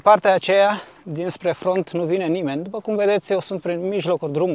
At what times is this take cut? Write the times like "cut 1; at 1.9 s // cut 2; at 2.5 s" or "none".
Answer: none